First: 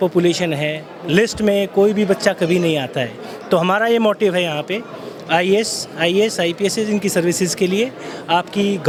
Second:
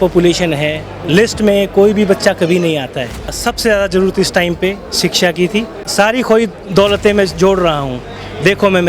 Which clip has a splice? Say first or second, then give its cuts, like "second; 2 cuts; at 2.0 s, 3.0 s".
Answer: second; 2 cuts; at 3.4 s, 5.8 s